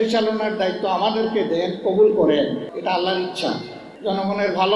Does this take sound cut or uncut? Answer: cut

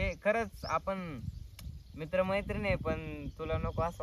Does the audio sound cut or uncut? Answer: uncut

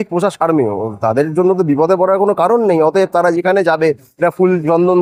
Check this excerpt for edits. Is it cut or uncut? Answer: uncut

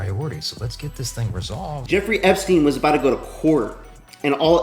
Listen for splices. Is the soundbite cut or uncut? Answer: cut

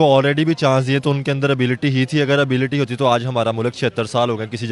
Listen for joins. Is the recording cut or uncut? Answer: uncut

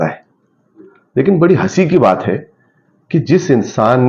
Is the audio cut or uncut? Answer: uncut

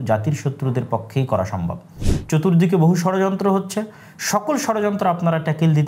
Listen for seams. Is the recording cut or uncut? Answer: cut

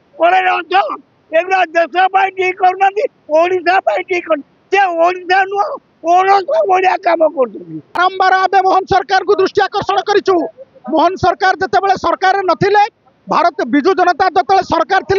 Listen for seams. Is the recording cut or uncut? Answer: cut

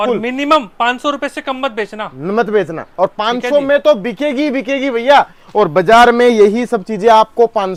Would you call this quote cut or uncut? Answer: uncut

